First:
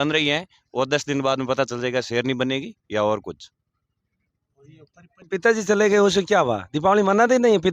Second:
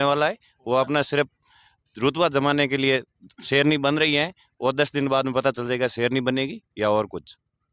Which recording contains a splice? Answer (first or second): first